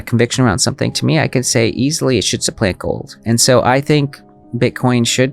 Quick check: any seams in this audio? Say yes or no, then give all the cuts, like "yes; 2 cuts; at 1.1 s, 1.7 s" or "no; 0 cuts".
no; 0 cuts